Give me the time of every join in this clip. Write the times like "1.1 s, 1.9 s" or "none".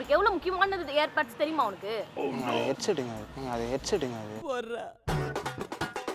3.3 s